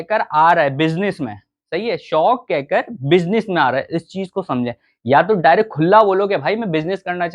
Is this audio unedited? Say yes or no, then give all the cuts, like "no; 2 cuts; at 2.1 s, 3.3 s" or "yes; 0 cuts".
yes; 0 cuts